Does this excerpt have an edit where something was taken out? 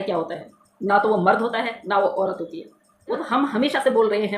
yes; 1 cut; at 3.2 s

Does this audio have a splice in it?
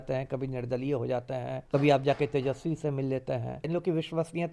yes; 2 cuts; at 1.6 s, 3.7 s

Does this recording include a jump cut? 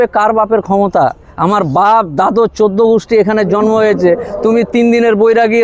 no; 0 cuts

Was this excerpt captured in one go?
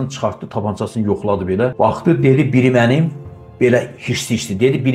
no; 1 cut; at 1.7 s

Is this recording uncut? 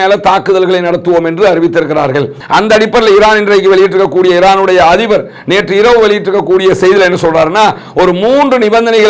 no; 1 cut; at 2.4 s

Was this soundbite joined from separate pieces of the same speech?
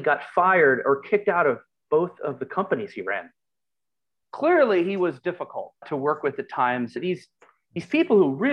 yes; 2 cuts; at 4.2 s, 7.0 s

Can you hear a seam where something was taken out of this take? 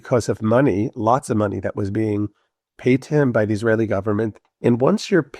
yes; 1 cut; at 4.4 s

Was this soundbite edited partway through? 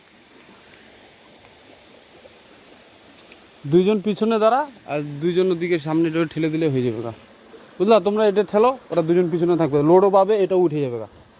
no; 0 cuts

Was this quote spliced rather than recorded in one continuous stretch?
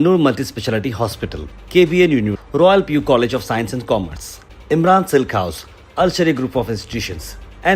no; 0 cuts

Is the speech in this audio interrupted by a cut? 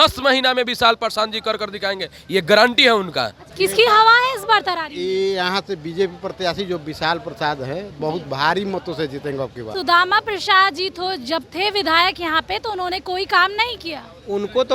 yes; 2 cuts; at 3.4 s, 9.7 s

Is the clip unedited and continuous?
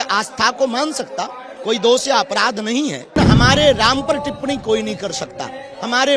no; 1 cut; at 3.2 s

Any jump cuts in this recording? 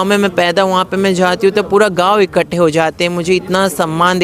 no; 0 cuts

